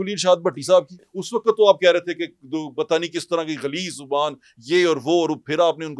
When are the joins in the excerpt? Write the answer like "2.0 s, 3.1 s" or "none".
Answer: 1.2 s